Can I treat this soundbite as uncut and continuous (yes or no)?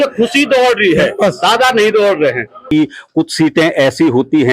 no